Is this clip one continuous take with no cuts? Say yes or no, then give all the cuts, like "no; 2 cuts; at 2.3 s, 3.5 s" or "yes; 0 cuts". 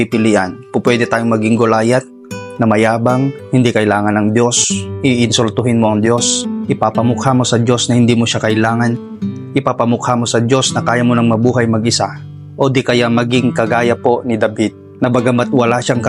yes; 0 cuts